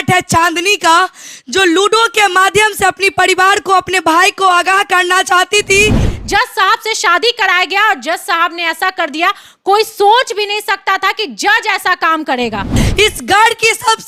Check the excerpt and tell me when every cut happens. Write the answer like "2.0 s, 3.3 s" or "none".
6.1 s, 12.8 s